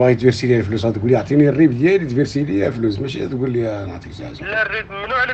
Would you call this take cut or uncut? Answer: uncut